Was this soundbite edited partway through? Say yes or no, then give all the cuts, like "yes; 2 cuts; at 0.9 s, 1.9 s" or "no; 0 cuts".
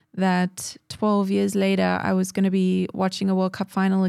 no; 0 cuts